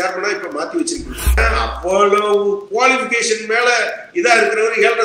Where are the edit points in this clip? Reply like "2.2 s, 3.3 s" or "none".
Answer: 1.4 s